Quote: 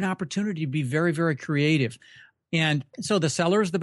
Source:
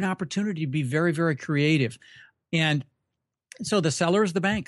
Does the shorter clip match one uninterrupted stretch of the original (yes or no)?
no